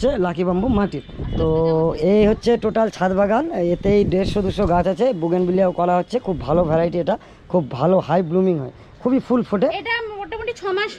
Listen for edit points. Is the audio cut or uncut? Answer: uncut